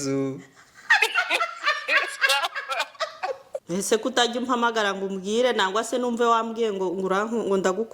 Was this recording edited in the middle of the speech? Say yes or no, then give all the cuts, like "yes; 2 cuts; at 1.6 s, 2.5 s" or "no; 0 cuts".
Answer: yes; 1 cut; at 3.5 s